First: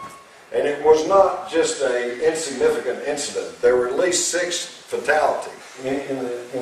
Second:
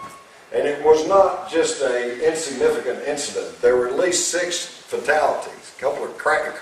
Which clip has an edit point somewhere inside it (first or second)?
second